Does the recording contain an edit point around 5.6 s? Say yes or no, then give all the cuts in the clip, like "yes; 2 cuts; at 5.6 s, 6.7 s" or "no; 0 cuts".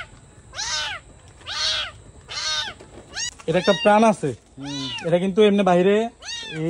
no; 1 cut; at 3.3 s